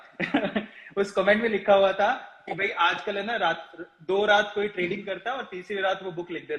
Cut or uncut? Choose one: uncut